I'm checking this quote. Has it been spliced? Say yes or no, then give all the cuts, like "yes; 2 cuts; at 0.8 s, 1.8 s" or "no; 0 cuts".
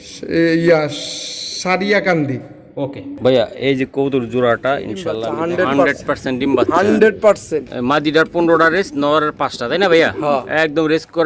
yes; 1 cut; at 5.3 s